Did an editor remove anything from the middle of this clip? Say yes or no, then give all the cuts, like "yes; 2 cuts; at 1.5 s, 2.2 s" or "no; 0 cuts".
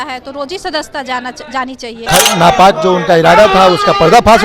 yes; 1 cut; at 2.1 s